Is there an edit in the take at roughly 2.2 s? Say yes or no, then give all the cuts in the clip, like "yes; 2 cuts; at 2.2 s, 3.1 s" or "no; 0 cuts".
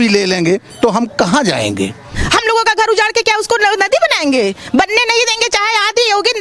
yes; 1 cut; at 2.2 s